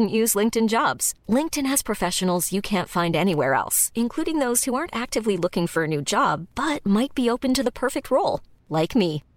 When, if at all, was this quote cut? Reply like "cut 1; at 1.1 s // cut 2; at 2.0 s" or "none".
none